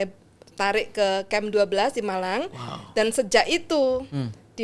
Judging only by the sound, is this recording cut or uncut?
uncut